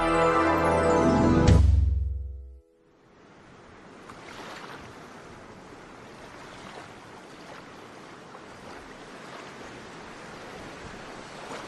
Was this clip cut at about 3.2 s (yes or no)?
no